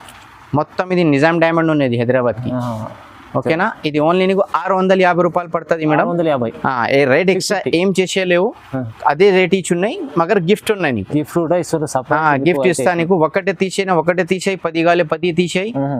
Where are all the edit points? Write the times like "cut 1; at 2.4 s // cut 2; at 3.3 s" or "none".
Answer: none